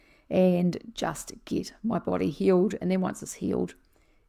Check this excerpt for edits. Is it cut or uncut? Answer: uncut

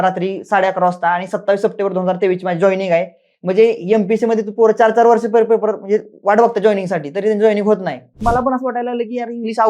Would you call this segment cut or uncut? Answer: cut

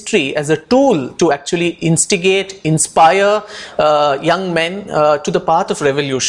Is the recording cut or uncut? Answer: uncut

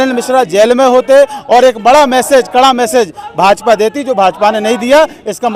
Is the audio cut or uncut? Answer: uncut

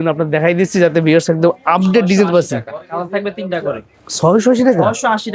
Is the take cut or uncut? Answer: uncut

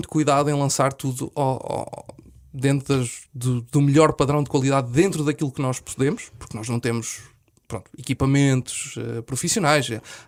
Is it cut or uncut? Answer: uncut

